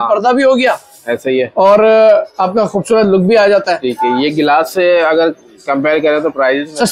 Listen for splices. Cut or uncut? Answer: uncut